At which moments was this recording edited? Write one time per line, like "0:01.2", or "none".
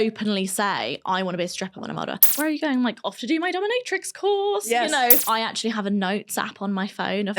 0:02.3
0:05.2